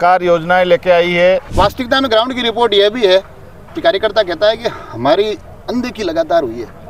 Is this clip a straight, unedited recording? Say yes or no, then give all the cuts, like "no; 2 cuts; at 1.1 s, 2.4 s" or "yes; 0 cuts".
no; 1 cut; at 1.5 s